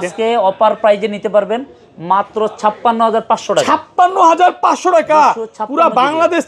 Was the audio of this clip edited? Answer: no; 0 cuts

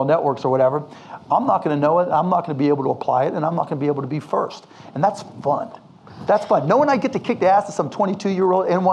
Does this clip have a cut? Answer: no; 0 cuts

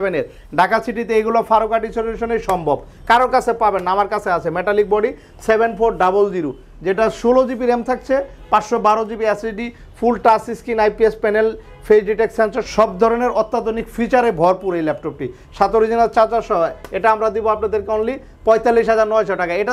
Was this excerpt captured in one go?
yes; 0 cuts

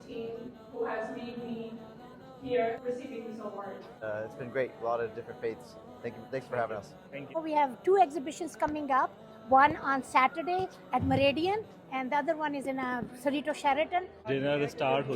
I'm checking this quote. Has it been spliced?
yes; 4 cuts; at 2.8 s, 4.0 s, 7.0 s, 14.2 s

